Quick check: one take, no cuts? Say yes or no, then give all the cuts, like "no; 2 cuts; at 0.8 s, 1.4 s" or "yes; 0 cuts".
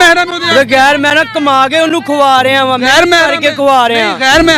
yes; 0 cuts